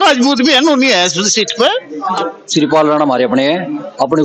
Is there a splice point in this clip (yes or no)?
yes